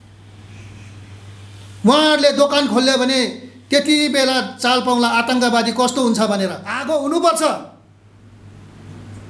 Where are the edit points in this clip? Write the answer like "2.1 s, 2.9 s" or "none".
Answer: 6.7 s

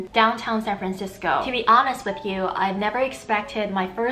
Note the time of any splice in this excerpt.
1.5 s

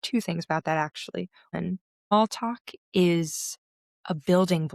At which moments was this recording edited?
1.4 s

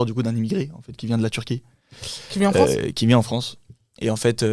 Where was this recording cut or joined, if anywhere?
none

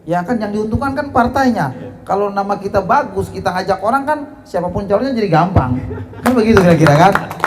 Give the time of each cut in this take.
none

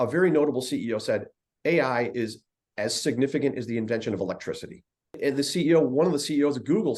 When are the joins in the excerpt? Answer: 5.2 s

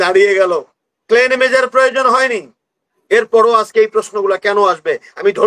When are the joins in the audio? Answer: none

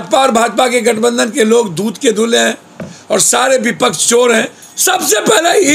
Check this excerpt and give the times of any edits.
4.7 s

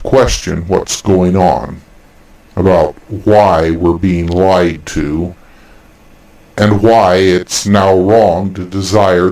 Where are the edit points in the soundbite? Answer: 2.9 s

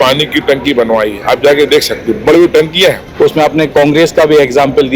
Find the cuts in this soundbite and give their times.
3.1 s

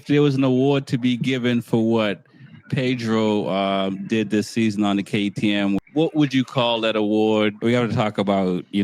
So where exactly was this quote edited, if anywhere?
5.8 s, 7.6 s

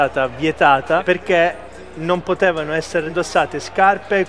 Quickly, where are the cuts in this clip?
1.0 s, 3.1 s

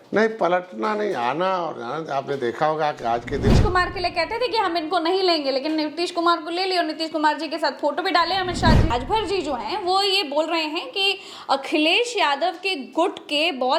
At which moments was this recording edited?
3.5 s, 8.9 s

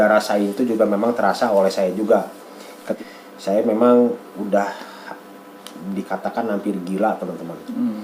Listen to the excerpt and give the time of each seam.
2.9 s

